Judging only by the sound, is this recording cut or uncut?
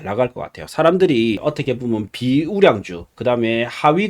cut